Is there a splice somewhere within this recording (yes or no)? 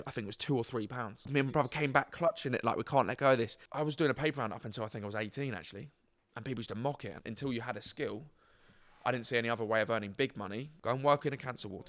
yes